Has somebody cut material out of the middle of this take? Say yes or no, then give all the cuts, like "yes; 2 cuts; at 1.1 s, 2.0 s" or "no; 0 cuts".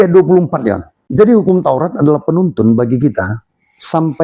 yes; 1 cut; at 0.9 s